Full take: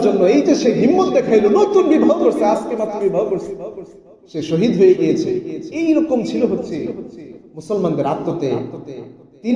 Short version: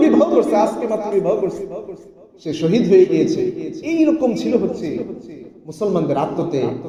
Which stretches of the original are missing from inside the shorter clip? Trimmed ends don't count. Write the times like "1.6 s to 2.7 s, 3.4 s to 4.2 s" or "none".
none

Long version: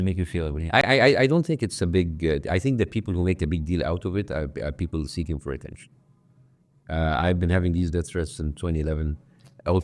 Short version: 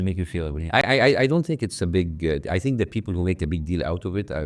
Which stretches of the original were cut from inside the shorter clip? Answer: none

